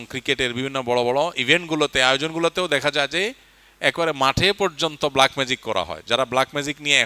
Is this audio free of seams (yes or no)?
yes